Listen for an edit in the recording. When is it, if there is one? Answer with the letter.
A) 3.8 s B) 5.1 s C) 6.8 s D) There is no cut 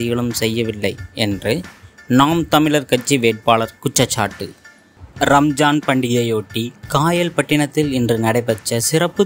B